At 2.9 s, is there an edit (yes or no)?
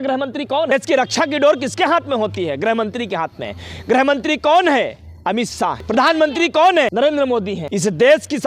no